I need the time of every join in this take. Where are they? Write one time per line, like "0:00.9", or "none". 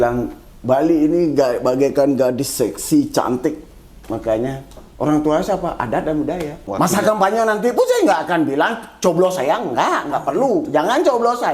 0:06.6